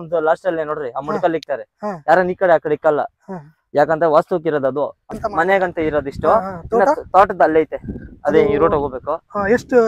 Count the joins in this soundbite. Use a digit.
1